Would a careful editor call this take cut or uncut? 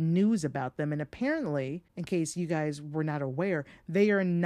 cut